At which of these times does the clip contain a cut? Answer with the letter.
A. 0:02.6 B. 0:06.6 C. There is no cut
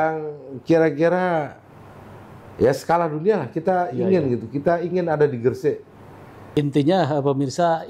B